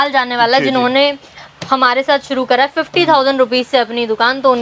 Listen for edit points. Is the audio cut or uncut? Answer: uncut